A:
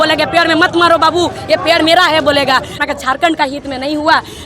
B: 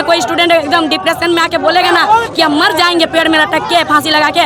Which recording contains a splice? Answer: A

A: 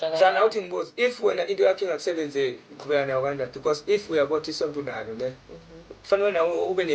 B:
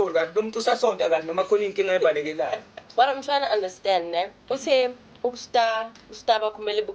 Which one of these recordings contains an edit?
B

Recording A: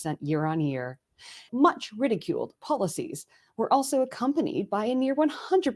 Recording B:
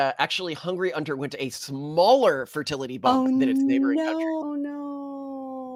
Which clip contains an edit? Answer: A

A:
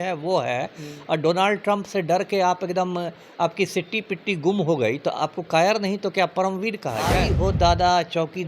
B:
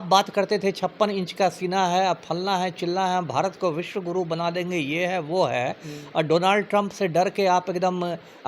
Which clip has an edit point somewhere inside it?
A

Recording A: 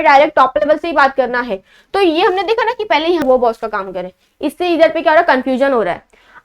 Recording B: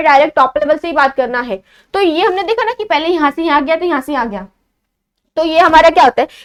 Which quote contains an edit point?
A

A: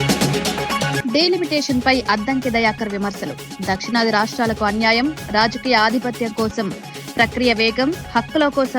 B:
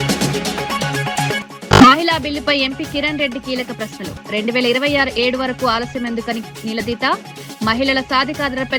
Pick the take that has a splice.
A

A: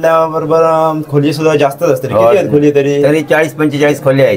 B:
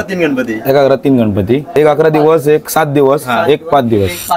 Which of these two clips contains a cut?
B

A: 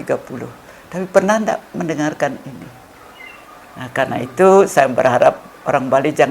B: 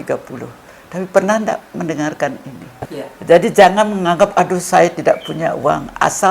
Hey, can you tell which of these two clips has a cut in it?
B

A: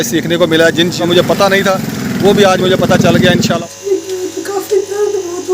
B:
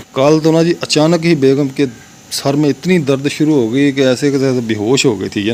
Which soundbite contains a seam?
A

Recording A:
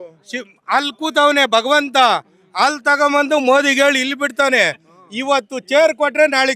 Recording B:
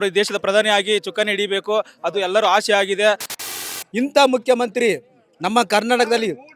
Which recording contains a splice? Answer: B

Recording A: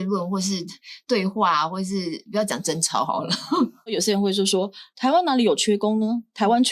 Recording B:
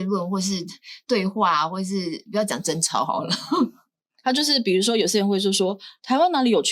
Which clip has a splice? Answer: A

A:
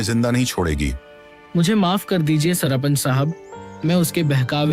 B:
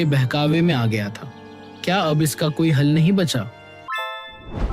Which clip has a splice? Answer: B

